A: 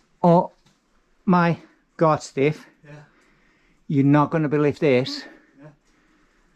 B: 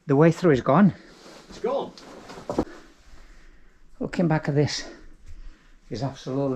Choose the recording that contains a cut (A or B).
B